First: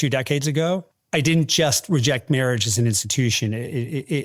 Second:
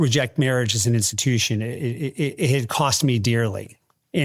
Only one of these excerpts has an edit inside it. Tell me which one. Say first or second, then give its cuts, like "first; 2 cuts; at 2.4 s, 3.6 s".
first; 1 cut; at 0.9 s